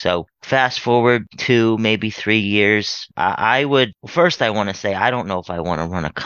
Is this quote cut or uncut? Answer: cut